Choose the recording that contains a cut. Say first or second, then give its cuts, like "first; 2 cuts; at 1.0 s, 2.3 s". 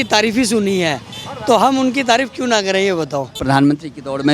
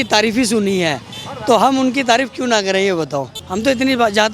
first; 1 cut; at 3.3 s